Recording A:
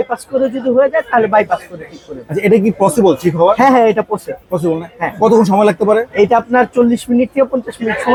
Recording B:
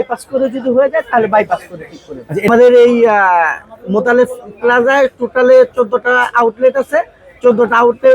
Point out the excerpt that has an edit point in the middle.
B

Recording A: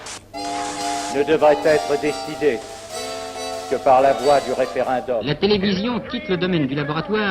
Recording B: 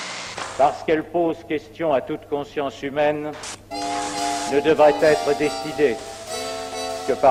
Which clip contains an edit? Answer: A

